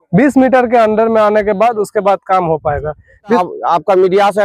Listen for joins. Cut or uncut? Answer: cut